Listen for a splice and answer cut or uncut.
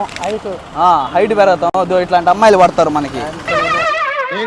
uncut